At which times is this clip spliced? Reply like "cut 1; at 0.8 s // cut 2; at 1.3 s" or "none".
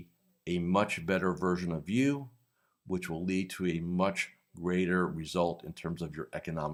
none